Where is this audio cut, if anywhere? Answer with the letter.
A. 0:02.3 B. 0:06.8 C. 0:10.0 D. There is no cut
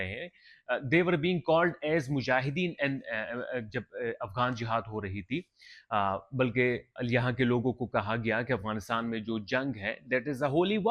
D